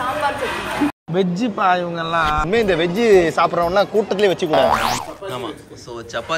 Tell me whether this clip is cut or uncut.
cut